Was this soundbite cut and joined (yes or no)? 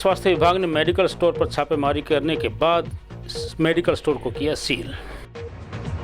yes